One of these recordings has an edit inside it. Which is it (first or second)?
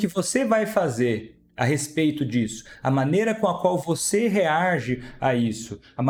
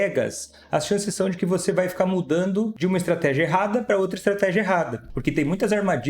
second